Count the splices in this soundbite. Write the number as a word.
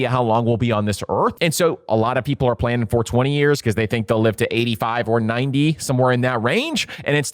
one